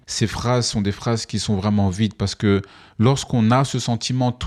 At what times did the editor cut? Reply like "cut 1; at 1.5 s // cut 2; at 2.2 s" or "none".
none